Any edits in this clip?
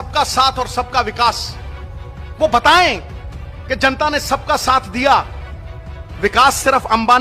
no; 0 cuts

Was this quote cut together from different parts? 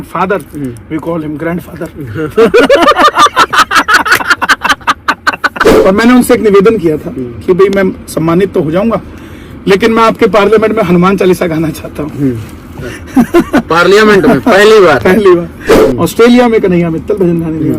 yes; 2 cuts; at 5.7 s, 15.8 s

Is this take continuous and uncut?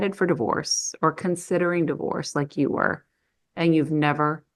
yes; 0 cuts

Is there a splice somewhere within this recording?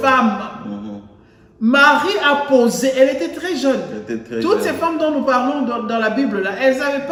no; 0 cuts

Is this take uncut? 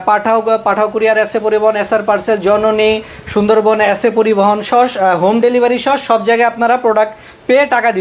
yes; 0 cuts

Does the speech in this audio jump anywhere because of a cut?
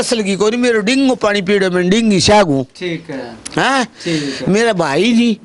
no; 0 cuts

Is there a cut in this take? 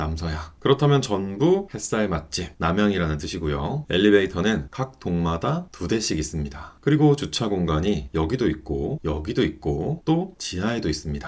no; 0 cuts

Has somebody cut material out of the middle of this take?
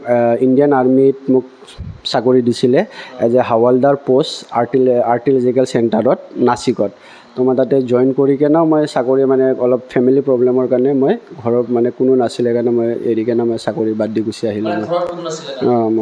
no; 0 cuts

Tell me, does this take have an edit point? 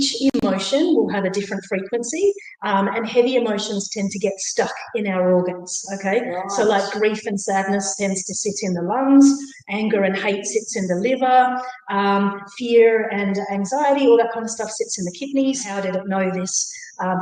yes; 1 cut; at 15.7 s

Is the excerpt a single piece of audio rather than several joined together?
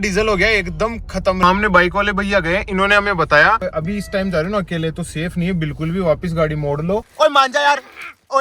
no; 2 cuts; at 1.4 s, 7.0 s

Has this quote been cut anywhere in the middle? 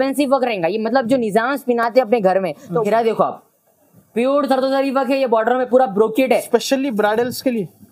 yes; 1 cut; at 2.9 s

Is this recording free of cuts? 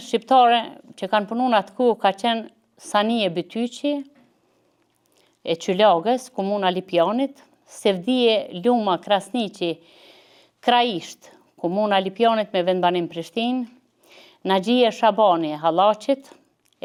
yes; 0 cuts

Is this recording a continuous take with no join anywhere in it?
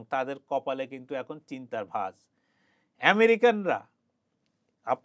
yes; 0 cuts

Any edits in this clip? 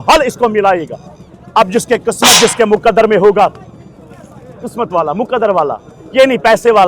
no; 0 cuts

